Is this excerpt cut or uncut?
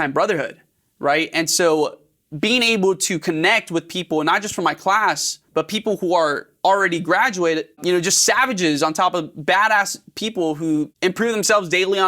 cut